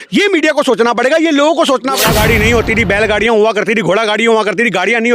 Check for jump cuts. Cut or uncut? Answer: cut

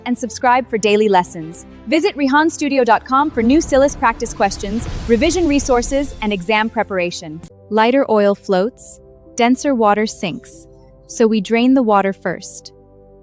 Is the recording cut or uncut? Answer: cut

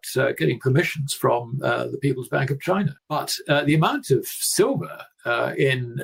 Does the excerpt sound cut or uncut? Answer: uncut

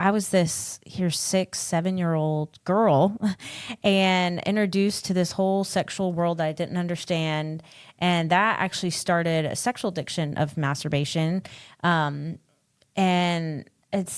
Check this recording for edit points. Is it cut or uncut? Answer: uncut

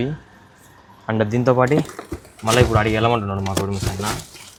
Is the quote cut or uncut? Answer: uncut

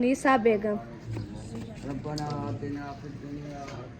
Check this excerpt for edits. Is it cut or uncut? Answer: cut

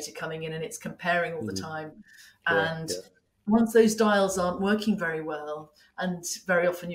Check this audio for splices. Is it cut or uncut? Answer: uncut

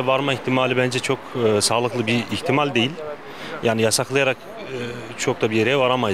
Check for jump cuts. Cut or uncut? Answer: uncut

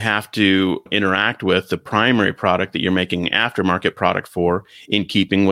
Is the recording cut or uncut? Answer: uncut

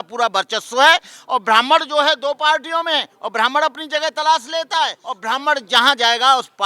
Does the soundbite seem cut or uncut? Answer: cut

